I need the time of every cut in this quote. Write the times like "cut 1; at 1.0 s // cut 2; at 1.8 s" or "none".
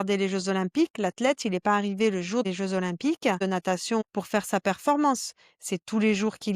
cut 1; at 2.4 s // cut 2; at 3.8 s